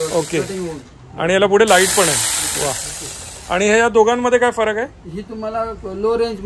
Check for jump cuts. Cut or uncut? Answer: uncut